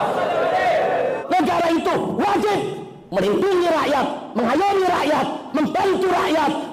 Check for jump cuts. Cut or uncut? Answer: cut